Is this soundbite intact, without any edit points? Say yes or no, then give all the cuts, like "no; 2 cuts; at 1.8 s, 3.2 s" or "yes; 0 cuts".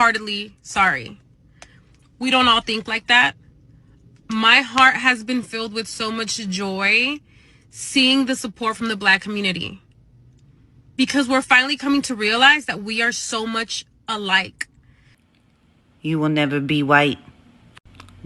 no; 1 cut; at 15.3 s